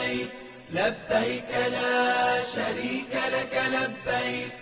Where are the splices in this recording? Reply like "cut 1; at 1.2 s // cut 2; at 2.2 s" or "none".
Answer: cut 1; at 1.8 s